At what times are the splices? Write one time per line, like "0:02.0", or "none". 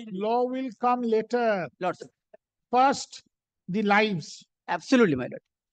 none